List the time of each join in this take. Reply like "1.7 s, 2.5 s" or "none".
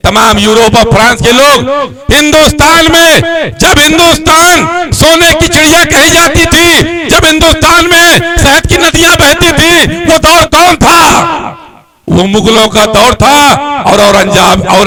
none